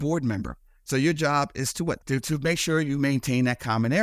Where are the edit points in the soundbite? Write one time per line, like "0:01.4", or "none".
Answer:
0:02.0